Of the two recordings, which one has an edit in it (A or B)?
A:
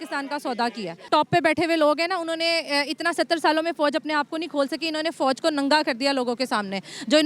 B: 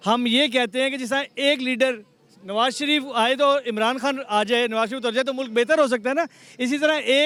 A